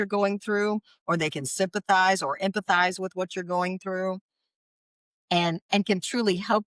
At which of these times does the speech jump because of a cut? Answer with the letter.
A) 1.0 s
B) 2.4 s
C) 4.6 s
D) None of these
D